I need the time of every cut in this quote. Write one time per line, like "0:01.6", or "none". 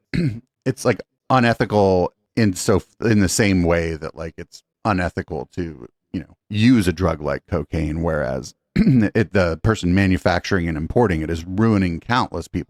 none

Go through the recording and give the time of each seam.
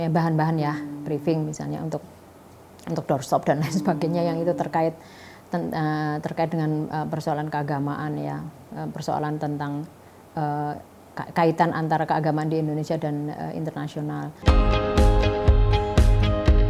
0:14.3

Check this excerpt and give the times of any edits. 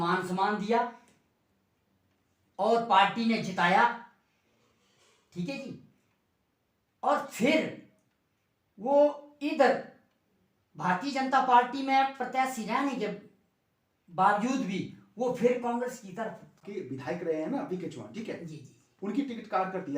0:16.6

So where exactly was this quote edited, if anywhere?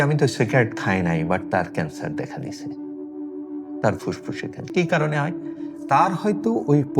none

